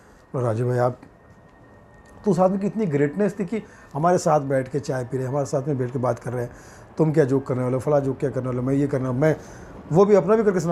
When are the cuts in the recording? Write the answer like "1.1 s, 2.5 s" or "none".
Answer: none